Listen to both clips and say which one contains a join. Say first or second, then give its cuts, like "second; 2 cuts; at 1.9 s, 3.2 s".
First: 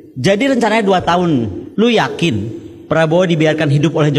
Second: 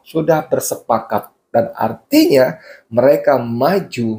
first; 1 cut; at 1.6 s